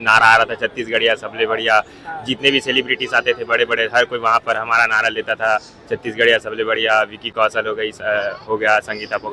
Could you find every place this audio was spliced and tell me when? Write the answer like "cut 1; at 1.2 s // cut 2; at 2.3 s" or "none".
none